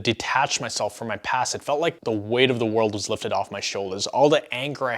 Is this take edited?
yes; 1 cut; at 2.0 s

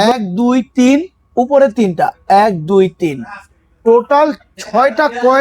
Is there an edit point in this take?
no; 0 cuts

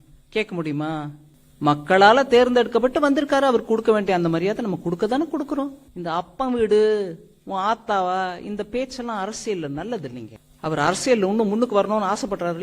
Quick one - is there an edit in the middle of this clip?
yes; 1 cut; at 5.9 s

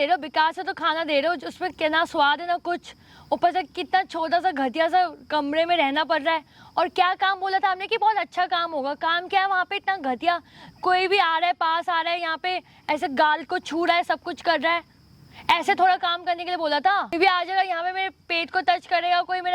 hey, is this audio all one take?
yes; 0 cuts

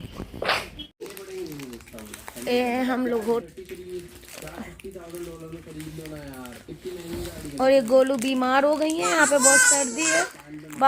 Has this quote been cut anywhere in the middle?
yes; 2 cuts; at 1.0 s, 3.4 s

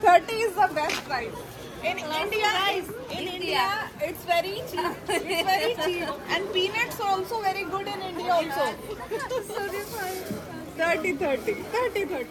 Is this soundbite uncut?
yes; 0 cuts

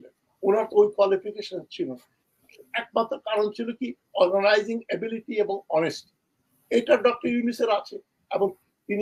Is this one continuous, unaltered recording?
yes; 0 cuts

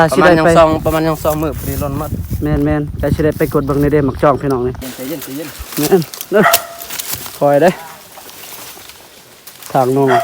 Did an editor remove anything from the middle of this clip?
yes; 1 cut; at 4.9 s

